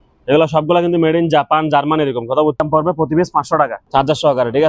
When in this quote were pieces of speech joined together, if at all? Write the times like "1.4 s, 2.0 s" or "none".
2.6 s, 3.8 s